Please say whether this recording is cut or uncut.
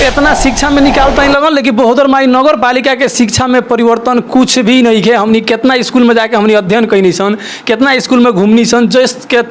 uncut